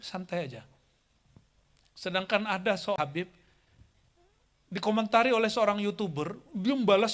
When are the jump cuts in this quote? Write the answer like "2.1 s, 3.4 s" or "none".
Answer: 3.0 s